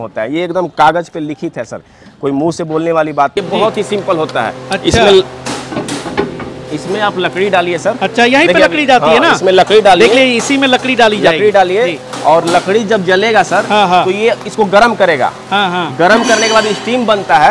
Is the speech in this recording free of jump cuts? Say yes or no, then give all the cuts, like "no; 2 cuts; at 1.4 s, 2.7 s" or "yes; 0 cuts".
no; 1 cut; at 3.4 s